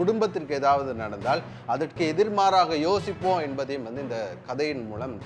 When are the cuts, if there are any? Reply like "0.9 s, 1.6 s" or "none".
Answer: none